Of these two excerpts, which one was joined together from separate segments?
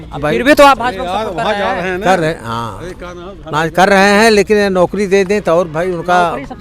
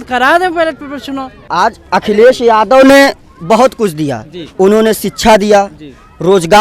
second; 1 cut; at 1.4 s

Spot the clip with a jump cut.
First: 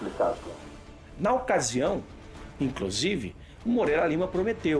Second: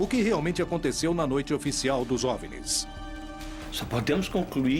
first; 1 cut; at 3.0 s

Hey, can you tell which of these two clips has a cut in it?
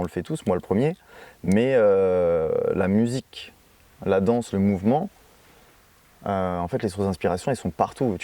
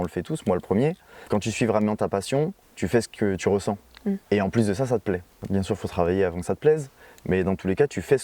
second; 4 cuts; at 1.1 s, 2.6 s, 4.2 s, 5.3 s

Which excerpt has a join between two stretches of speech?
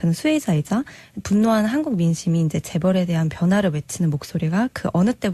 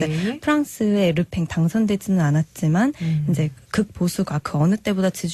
first; 1 cut; at 3.2 s

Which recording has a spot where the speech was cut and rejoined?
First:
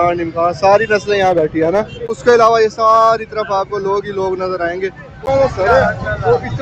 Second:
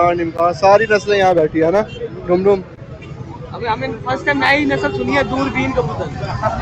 first; 2 cuts; at 2.2 s, 5.2 s

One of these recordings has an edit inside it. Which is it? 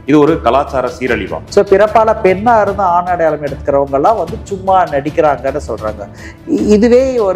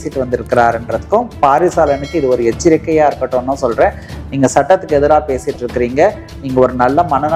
first; 1 cut; at 1.3 s

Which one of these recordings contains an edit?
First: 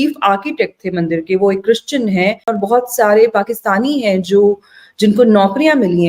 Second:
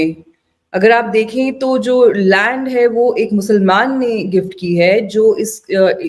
first; 1 cut; at 2.5 s

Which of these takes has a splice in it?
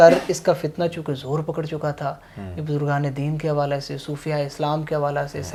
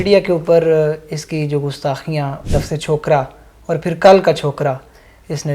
second; 1 cut; at 2.4 s

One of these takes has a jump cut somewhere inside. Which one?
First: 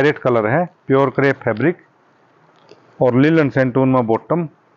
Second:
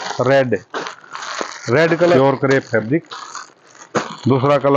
second; 1 cut; at 2.2 s

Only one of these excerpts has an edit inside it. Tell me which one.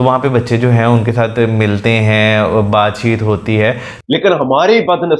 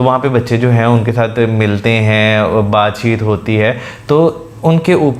first; 1 cut; at 3.9 s

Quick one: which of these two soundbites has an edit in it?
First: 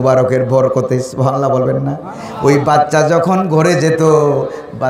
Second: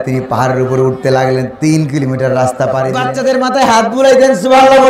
second; 1 cut; at 3.0 s

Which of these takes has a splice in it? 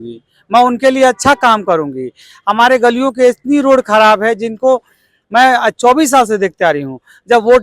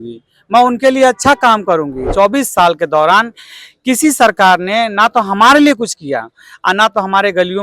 second; 1 cut; at 2.0 s

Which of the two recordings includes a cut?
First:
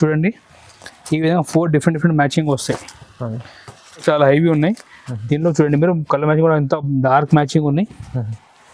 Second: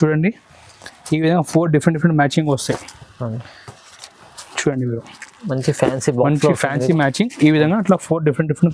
first; 1 cut; at 4.0 s

